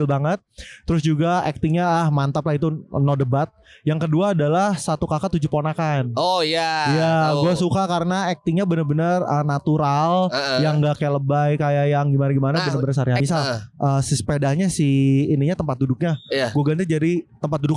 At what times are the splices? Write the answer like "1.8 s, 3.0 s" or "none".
13.2 s

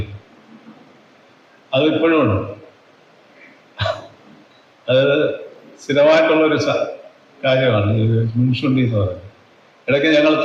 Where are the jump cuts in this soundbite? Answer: none

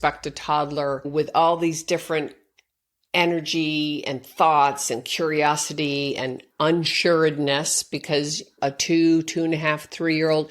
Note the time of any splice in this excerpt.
1.1 s, 8.5 s

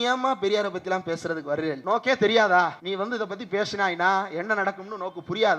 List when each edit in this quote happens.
1.8 s, 2.8 s

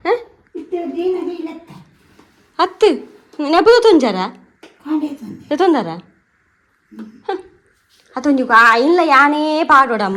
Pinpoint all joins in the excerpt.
none

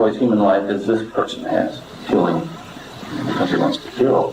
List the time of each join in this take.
1.9 s

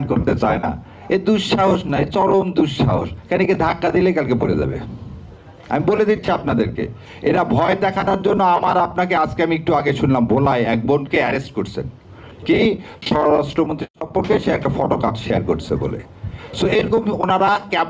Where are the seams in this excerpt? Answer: none

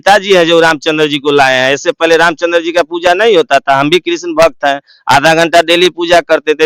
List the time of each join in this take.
none

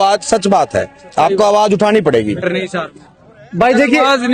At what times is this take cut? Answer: 2.5 s

